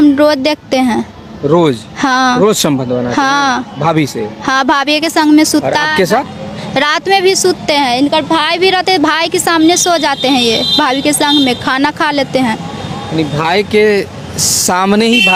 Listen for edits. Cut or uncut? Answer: uncut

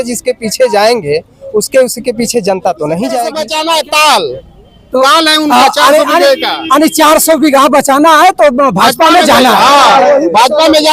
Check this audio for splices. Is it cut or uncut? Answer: cut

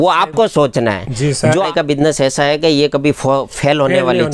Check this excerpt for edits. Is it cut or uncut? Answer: cut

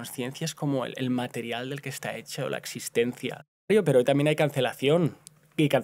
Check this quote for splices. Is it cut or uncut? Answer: cut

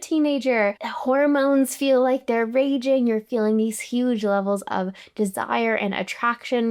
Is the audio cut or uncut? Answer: uncut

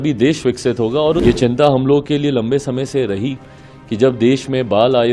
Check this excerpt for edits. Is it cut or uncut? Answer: cut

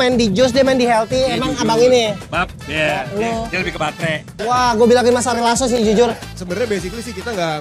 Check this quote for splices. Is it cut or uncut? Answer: cut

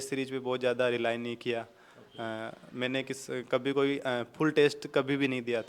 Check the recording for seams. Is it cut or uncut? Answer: uncut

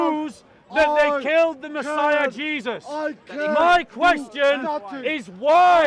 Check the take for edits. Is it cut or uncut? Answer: uncut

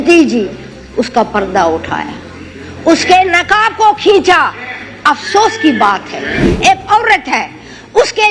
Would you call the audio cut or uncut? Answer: cut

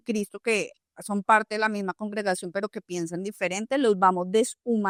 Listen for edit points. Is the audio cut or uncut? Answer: uncut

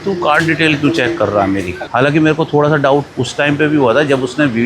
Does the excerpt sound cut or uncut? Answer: cut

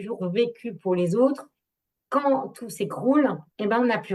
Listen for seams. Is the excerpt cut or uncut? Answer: uncut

